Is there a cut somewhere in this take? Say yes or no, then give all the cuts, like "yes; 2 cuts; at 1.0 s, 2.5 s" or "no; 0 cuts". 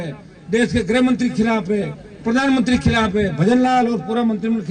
no; 0 cuts